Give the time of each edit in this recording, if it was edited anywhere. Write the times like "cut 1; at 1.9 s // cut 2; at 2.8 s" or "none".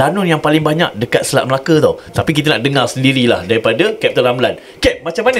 cut 1; at 2.1 s